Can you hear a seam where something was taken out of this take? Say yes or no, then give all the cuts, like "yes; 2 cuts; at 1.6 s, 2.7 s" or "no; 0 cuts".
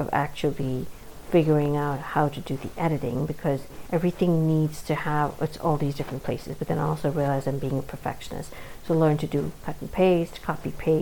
yes; 1 cut; at 3.7 s